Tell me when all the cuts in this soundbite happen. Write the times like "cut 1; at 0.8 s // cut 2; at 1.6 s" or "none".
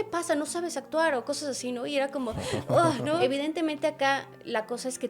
cut 1; at 3.2 s

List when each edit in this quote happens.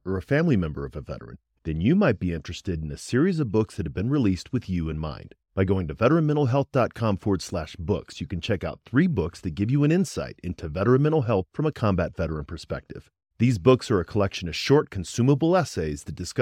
none

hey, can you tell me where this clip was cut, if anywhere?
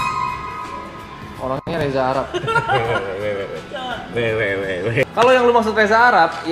cut 1; at 5.0 s

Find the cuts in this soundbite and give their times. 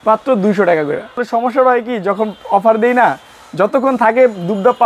cut 1; at 1.2 s

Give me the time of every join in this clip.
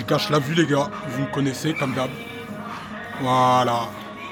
none

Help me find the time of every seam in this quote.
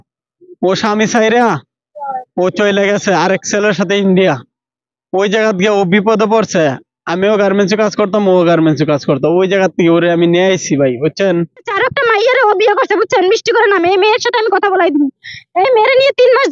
cut 1; at 11.7 s

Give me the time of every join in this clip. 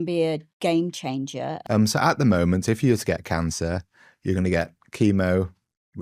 cut 1; at 1.6 s

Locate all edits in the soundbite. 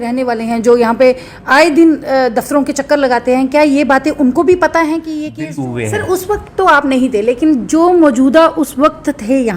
cut 1; at 5.5 s

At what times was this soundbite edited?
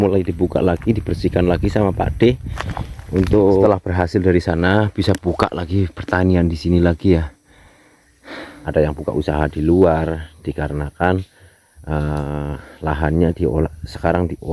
cut 1; at 3.6 s // cut 2; at 9.0 s

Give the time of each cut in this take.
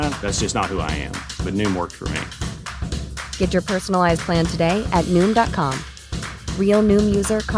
none

